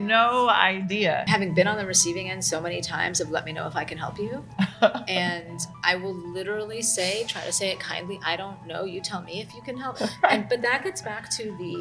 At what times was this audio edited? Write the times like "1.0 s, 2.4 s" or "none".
1.2 s, 9.9 s